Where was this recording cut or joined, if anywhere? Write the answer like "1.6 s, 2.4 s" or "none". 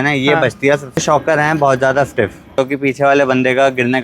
1.0 s, 2.6 s